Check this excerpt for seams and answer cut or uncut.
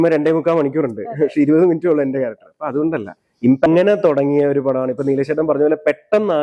cut